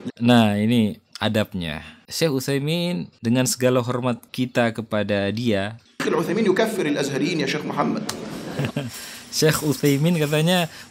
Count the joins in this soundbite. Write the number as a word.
two